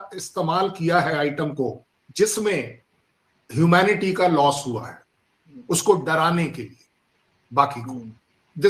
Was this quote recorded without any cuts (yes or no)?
yes